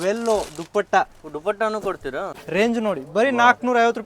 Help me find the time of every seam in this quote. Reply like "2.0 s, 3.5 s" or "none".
2.4 s